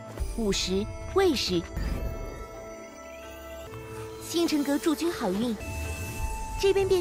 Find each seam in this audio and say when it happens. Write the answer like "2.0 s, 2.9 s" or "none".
none

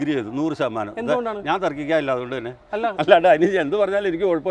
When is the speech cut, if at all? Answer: none

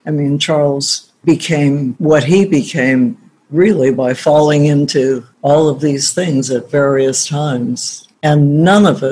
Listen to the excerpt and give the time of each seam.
1.9 s

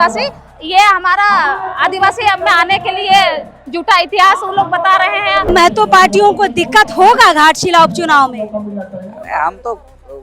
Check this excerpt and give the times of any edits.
5.5 s

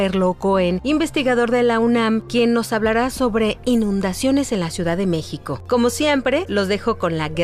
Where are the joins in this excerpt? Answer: none

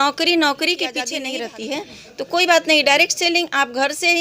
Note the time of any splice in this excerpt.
1.1 s

